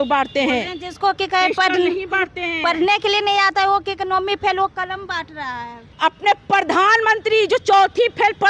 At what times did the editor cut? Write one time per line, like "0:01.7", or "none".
0:05.8